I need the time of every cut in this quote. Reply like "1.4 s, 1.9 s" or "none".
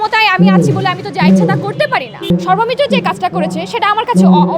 2.3 s